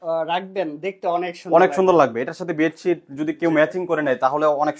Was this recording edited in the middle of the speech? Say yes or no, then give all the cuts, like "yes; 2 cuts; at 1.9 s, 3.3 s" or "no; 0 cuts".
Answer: no; 0 cuts